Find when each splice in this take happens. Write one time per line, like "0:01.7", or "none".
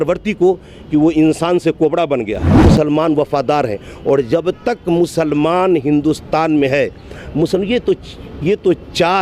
0:02.6